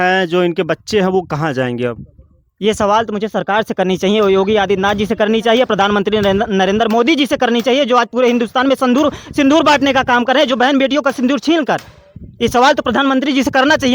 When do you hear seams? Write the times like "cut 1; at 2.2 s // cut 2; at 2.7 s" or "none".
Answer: none